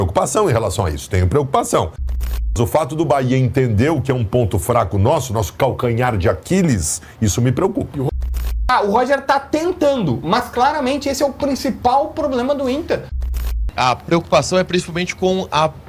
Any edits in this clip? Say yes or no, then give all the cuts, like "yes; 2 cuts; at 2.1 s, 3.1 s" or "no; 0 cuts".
yes; 3 cuts; at 2.2 s, 8.1 s, 13.6 s